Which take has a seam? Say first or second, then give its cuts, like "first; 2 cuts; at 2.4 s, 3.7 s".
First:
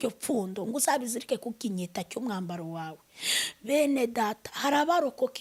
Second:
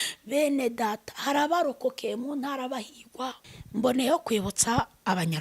second; 1 cut; at 3.5 s